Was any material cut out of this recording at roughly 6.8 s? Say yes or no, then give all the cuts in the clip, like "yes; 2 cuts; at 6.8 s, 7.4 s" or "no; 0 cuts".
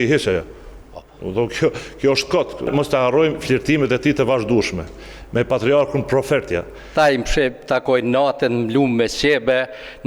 yes; 2 cuts; at 2.7 s, 6.8 s